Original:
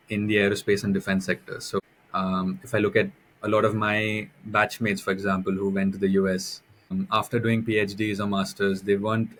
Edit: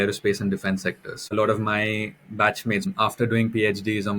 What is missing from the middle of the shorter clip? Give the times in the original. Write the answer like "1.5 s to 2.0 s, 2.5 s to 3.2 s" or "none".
1.5 s to 3.3 s, 5.0 s to 7.0 s